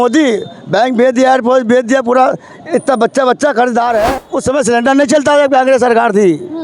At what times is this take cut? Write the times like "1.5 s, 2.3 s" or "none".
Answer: 4.2 s